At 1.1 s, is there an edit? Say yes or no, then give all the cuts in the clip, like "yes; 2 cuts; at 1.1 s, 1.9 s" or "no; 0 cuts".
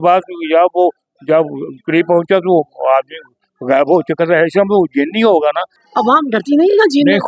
no; 1 cut; at 5.8 s